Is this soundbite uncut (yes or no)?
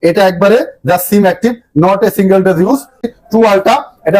no